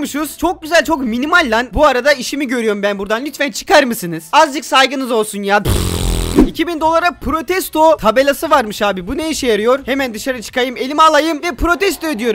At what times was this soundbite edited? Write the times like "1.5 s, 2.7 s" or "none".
6.4 s